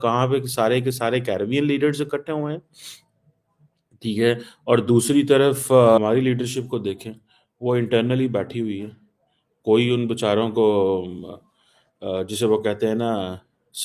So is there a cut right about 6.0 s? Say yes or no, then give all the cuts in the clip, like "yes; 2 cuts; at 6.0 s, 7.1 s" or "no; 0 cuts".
yes; 1 cut; at 6.0 s